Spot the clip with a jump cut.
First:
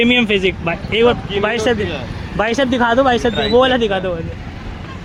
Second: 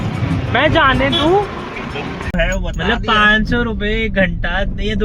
second; 1 cut; at 2.4 s

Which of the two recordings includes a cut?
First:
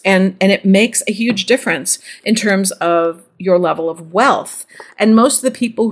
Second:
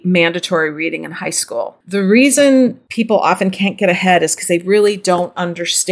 second; 2 cuts; at 1.8 s, 2.8 s

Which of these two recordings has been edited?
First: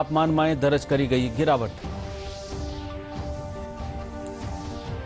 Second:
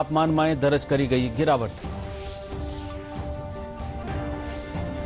second; 1 cut; at 4.1 s

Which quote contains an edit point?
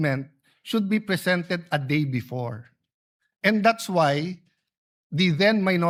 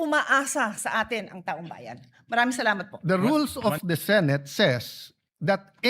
second; 1 cut; at 2.9 s

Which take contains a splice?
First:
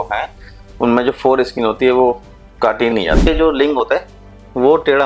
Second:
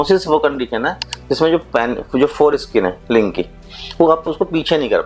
first; 1 cut; at 3.2 s

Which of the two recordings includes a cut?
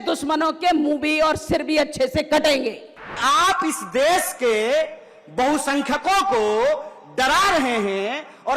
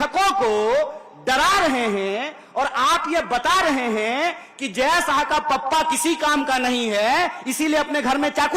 first; 1 cut; at 3.2 s

